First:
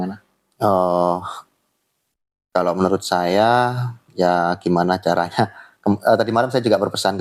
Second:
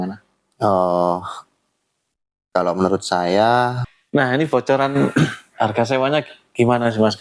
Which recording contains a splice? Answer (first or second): second